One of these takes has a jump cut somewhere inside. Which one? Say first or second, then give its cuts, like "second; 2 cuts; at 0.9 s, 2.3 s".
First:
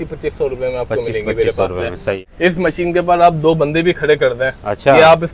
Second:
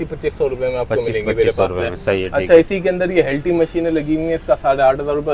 first; 1 cut; at 2.2 s